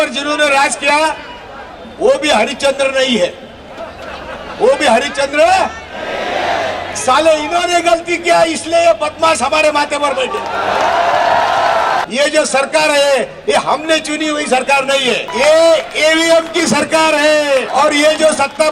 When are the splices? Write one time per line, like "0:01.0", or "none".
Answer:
0:12.0
0:15.3
0:17.7